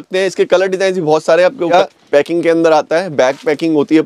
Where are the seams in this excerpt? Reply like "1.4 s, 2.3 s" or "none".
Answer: 1.7 s